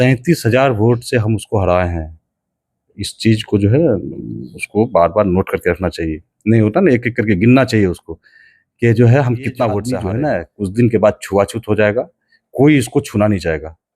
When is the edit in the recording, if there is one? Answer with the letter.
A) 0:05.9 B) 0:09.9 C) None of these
B